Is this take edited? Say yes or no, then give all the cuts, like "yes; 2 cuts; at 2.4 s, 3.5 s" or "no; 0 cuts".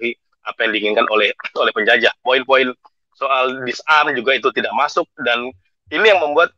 no; 0 cuts